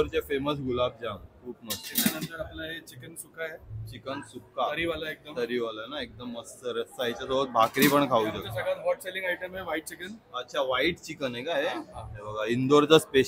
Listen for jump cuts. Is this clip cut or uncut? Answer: uncut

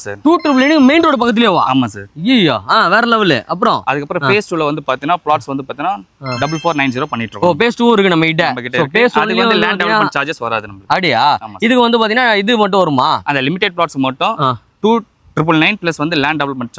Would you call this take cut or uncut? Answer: uncut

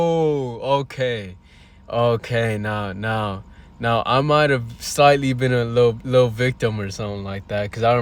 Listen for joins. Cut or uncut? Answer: uncut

